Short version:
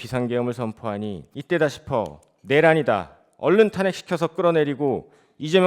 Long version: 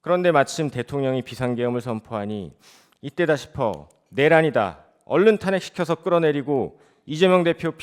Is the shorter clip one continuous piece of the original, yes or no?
no